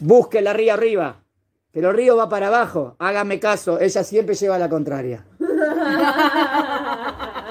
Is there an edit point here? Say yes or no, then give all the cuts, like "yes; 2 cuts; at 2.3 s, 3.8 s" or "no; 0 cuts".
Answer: no; 0 cuts